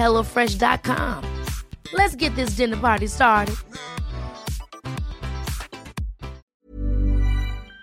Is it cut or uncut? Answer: cut